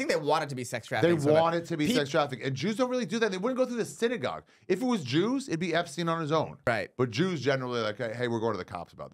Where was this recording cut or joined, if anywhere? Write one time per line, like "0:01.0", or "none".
0:06.7